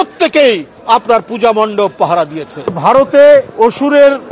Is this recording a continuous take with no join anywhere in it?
no; 2 cuts; at 2.8 s, 3.5 s

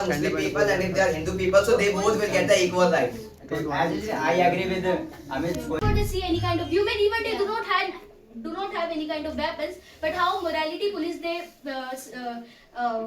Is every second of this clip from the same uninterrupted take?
no; 1 cut; at 5.8 s

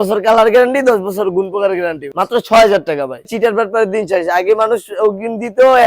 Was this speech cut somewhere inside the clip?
yes; 2 cuts; at 2.1 s, 3.3 s

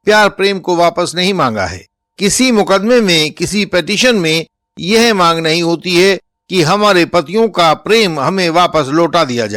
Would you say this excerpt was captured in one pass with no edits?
yes; 0 cuts

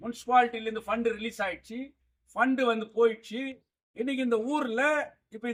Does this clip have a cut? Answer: no; 0 cuts

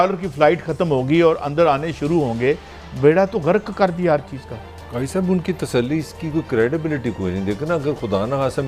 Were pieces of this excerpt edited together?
no; 0 cuts

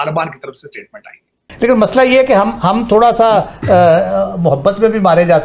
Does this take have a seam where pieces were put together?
no; 0 cuts

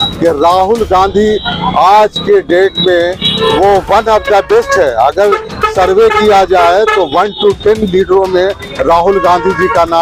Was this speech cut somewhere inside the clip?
no; 0 cuts

